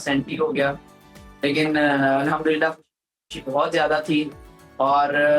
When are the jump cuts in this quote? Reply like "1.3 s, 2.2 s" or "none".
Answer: none